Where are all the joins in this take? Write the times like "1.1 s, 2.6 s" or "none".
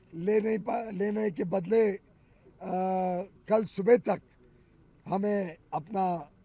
none